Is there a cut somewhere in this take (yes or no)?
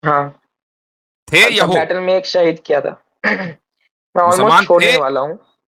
no